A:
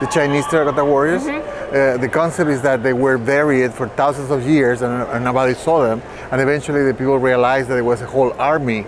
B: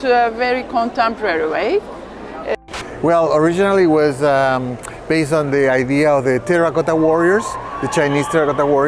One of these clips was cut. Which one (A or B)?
B